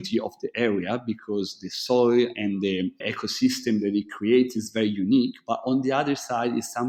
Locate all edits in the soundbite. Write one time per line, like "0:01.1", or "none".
none